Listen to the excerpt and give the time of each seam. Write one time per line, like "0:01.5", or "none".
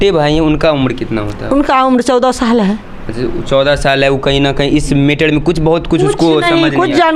none